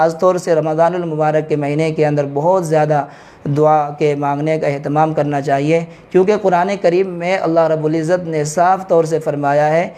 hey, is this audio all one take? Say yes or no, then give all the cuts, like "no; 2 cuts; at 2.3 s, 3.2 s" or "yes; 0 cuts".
yes; 0 cuts